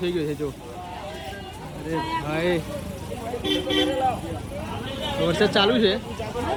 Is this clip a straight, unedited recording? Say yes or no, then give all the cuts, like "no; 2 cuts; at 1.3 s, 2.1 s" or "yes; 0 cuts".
yes; 0 cuts